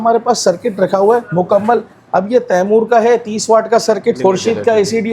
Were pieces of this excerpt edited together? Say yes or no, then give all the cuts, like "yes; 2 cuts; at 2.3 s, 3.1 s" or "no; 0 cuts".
yes; 2 cuts; at 1.3 s, 4.2 s